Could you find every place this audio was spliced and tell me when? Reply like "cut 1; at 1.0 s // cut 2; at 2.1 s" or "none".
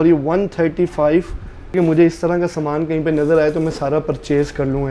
cut 1; at 1.7 s